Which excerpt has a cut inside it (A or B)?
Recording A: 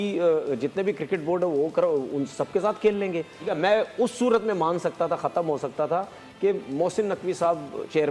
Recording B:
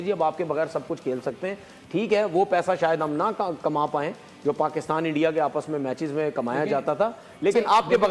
A